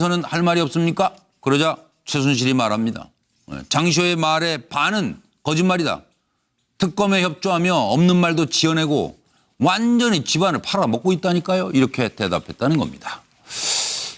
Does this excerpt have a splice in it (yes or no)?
no